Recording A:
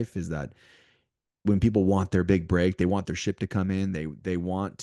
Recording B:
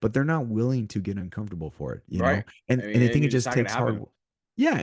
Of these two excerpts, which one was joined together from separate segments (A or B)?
B